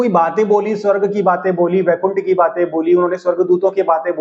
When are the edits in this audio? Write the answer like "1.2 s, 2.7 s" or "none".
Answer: none